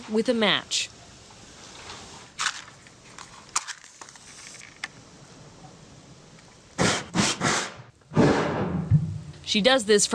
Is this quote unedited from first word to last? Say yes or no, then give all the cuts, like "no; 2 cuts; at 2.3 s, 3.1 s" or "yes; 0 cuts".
yes; 0 cuts